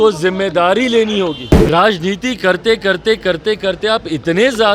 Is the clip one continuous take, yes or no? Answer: no